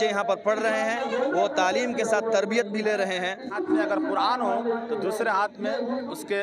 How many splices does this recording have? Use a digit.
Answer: 1